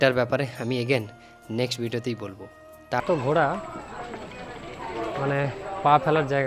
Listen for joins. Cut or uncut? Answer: cut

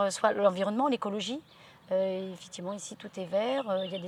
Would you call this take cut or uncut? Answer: uncut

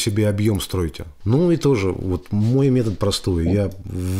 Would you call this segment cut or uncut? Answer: cut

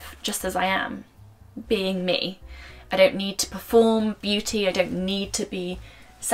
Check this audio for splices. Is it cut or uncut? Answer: uncut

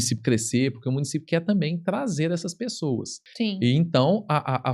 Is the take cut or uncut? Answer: cut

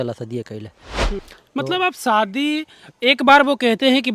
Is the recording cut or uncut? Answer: cut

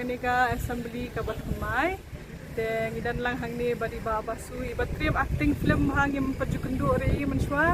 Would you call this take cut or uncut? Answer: uncut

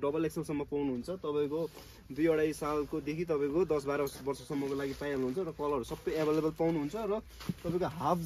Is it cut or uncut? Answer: uncut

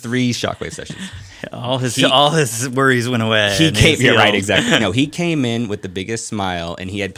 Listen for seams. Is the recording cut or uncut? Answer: uncut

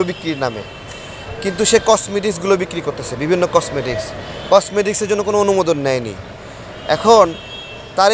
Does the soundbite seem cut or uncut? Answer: uncut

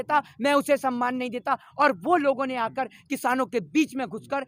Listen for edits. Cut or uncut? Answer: uncut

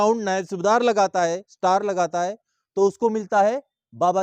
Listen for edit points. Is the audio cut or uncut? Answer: uncut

